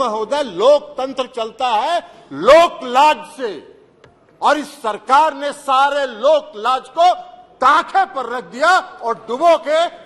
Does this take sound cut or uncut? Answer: uncut